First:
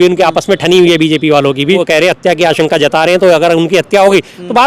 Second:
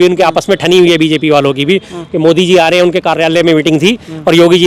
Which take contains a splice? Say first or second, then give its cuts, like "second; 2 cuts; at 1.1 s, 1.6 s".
first; 1 cut; at 1.8 s